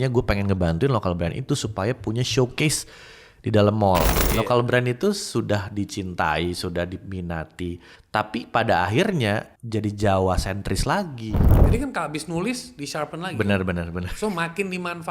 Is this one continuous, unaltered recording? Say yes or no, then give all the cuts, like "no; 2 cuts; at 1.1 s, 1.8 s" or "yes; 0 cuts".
no; 4 cuts; at 4.2 s, 7.9 s, 9.6 s, 11.5 s